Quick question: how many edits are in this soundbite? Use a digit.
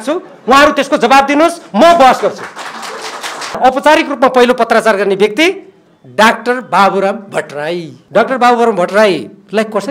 2